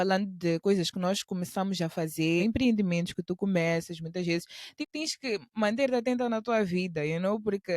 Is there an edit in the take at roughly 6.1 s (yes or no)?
no